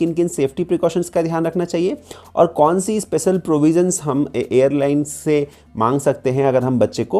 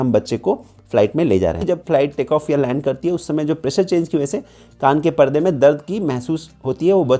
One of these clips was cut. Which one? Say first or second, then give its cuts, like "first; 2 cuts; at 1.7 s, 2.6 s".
second; 1 cut; at 1.6 s